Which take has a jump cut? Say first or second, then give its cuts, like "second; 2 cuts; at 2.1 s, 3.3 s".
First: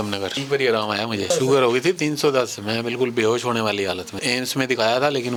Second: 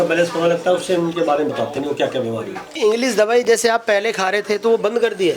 second; 1 cut; at 2.7 s